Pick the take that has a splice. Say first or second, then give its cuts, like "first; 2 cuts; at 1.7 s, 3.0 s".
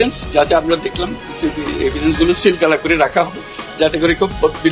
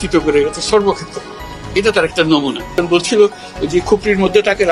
second; 1 cut; at 2.7 s